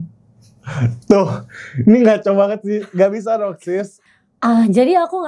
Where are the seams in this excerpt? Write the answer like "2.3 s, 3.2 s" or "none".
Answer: 4.0 s